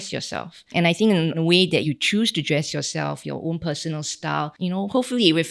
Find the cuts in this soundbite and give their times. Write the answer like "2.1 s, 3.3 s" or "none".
1.8 s